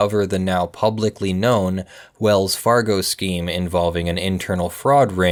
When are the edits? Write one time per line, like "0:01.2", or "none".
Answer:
none